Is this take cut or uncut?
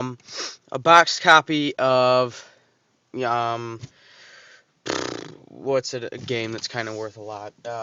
uncut